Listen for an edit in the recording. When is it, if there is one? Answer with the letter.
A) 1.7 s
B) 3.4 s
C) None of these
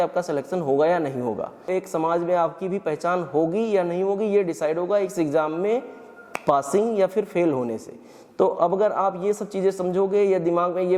A